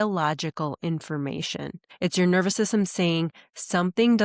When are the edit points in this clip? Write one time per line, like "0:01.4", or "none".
0:01.8